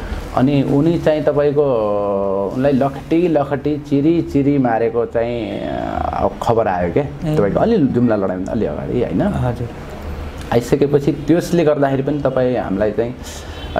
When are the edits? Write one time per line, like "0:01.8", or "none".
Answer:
none